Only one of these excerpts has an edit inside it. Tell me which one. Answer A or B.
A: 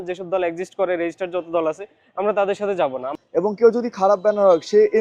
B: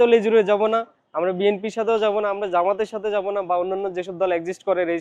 A